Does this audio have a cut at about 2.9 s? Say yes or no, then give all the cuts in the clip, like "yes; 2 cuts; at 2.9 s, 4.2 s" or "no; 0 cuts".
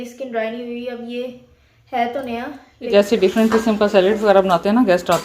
yes; 1 cut; at 2.9 s